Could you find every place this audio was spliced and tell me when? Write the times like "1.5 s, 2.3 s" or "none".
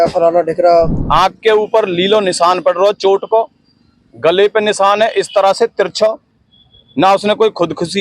1.0 s